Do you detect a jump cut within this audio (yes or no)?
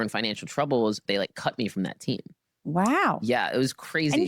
yes